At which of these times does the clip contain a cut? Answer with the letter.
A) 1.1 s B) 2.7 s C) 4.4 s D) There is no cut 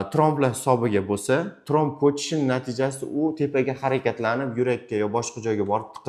D